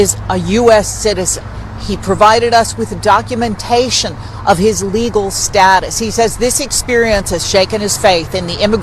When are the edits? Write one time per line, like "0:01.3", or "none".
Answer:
none